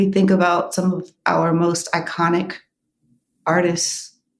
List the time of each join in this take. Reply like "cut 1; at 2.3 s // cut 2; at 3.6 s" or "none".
none